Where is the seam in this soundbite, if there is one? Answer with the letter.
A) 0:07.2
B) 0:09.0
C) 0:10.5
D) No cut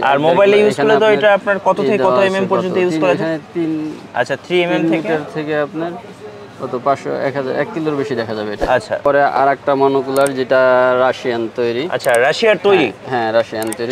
B